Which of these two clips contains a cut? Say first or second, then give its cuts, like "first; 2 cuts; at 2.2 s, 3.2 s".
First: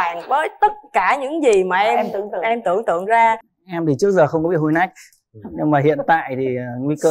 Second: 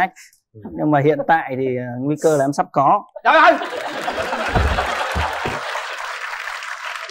first; 1 cut; at 3.5 s